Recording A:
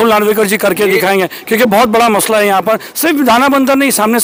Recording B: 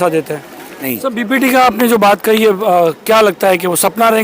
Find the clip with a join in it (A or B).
B